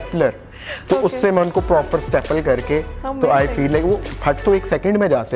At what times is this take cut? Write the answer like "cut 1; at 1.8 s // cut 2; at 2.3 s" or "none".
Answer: none